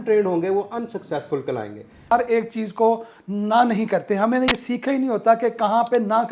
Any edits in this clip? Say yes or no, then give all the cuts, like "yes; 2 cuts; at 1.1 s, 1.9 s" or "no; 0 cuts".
yes; 1 cut; at 2.1 s